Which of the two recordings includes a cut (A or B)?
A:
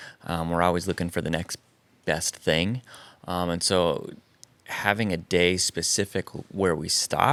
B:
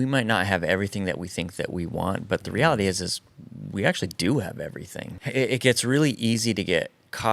B